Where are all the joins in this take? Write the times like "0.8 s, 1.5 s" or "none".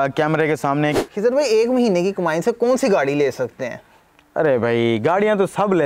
1.0 s